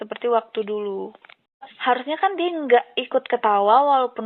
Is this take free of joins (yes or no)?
no